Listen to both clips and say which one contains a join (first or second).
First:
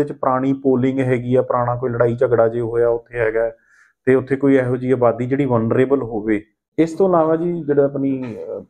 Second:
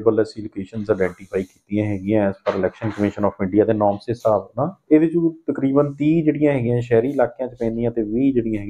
first